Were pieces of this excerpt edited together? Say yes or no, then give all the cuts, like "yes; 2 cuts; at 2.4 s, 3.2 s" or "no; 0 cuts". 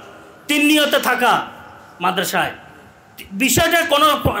no; 0 cuts